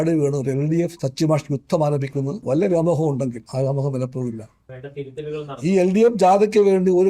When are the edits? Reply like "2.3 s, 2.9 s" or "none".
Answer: 1.0 s, 2.4 s, 3.4 s